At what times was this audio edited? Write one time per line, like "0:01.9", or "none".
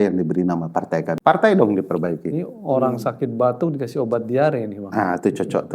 0:01.1

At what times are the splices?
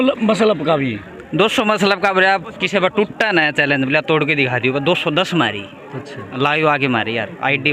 none

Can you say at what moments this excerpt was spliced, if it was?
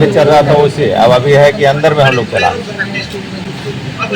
none

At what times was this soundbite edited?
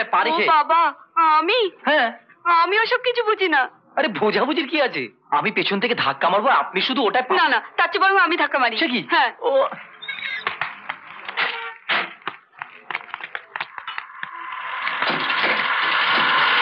none

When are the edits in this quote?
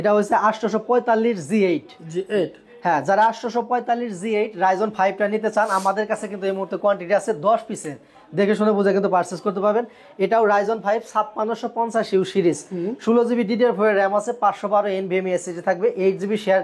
none

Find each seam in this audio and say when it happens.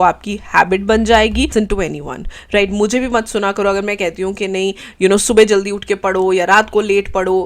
0:01.5

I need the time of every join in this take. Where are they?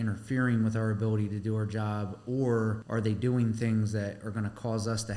0:02.8

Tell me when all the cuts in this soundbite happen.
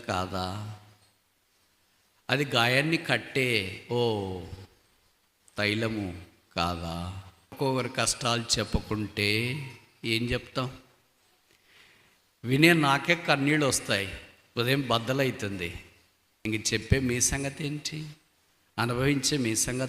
0:07.6

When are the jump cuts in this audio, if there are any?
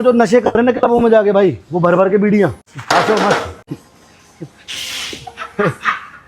0:02.7
0:03.7

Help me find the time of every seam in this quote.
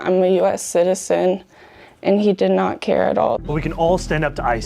0:03.4

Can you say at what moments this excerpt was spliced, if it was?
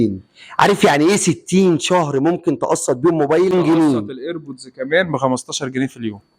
0:03.5

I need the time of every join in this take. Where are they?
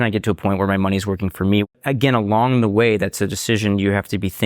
0:01.6

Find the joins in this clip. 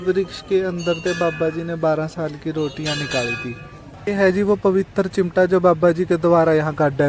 0:04.0

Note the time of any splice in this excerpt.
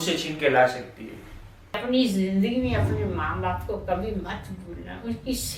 0:01.8

